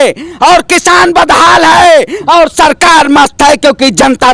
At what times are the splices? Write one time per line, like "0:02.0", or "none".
none